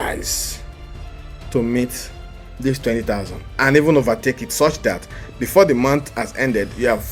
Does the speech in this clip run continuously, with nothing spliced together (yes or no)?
yes